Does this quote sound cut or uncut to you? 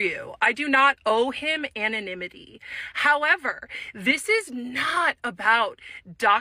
uncut